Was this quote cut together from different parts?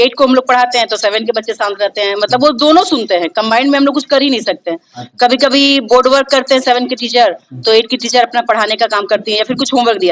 no; 0 cuts

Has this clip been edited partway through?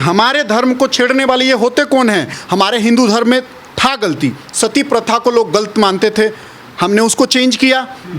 yes; 1 cut; at 2.4 s

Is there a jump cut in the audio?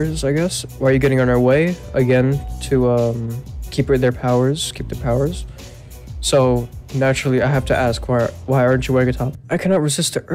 yes; 1 cut; at 9.4 s

